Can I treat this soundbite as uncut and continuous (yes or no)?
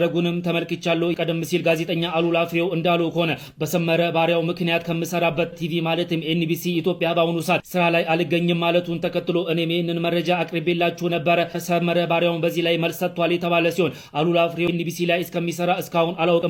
yes